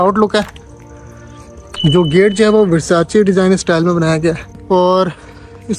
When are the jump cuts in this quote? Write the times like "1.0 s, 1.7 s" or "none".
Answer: 4.5 s